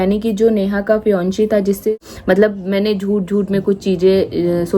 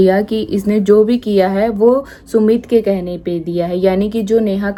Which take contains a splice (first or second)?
first